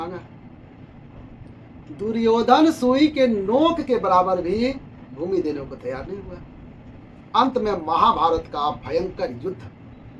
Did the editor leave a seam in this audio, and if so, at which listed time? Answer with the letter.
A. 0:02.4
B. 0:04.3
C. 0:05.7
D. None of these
D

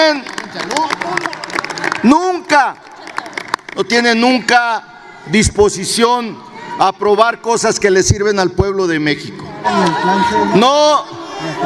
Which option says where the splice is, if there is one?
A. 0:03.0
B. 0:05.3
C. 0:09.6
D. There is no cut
C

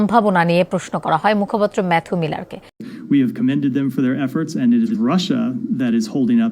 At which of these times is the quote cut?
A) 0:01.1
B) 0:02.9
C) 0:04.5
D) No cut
B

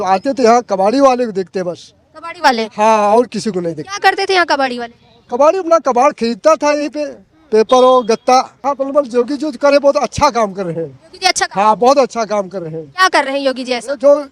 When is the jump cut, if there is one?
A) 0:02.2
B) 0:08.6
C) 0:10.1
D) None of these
B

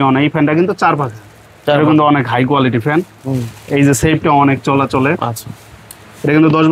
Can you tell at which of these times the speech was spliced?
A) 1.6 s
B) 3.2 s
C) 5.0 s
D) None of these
D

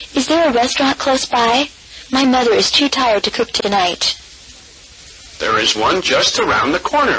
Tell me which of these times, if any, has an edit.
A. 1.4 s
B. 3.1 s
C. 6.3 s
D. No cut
C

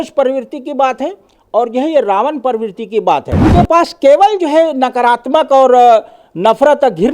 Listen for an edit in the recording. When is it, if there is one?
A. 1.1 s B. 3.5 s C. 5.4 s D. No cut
B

